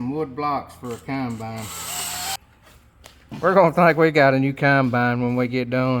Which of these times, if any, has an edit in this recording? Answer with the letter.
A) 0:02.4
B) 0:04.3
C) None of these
A